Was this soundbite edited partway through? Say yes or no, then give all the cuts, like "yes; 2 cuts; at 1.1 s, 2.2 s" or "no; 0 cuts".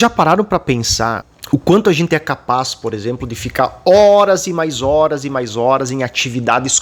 yes; 1 cut; at 1.3 s